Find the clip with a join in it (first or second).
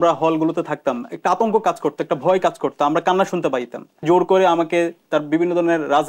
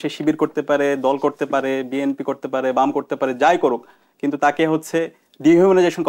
first